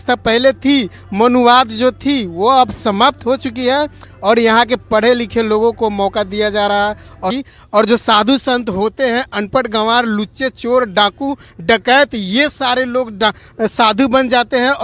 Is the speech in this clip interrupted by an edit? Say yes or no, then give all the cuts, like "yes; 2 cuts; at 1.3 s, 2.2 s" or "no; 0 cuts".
yes; 1 cut; at 7.3 s